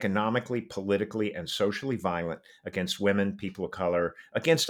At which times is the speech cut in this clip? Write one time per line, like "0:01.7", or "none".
none